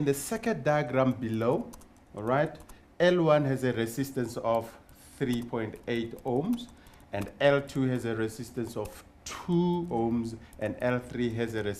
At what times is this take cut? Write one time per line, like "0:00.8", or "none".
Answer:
0:08.4